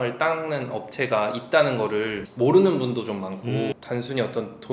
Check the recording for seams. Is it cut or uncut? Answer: cut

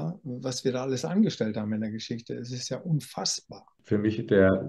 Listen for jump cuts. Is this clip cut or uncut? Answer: cut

